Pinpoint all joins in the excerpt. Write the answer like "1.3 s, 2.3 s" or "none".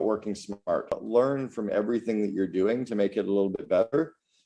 0.9 s